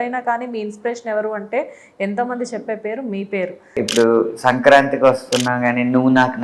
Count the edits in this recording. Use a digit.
1